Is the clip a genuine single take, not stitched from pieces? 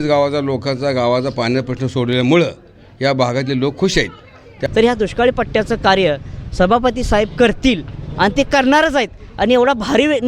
no; 1 cut; at 4.6 s

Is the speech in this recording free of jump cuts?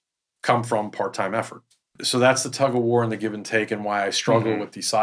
no; 1 cut; at 2.0 s

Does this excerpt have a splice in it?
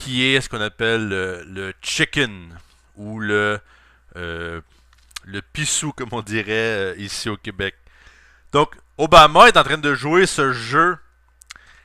yes; 1 cut; at 4.4 s

